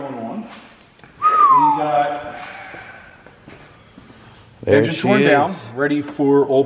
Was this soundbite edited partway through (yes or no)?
no